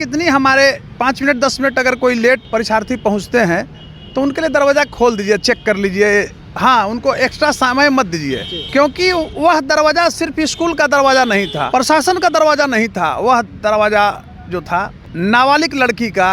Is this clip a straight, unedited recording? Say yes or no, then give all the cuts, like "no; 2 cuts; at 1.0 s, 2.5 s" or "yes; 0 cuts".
no; 5 cuts; at 0.9 s, 2.4 s, 8.5 s, 11.6 s, 15.0 s